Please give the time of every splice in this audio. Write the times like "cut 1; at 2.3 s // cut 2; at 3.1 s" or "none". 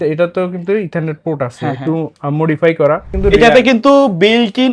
cut 1; at 3.1 s